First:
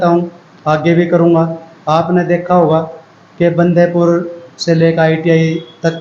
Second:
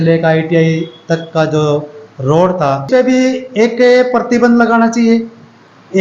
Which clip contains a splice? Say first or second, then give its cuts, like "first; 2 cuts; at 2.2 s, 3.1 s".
second; 1 cut; at 2.8 s